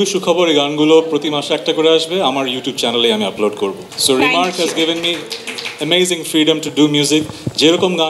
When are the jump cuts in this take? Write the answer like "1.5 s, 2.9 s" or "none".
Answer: 3.9 s